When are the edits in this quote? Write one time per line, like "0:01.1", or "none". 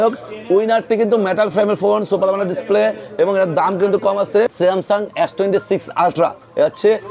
0:04.5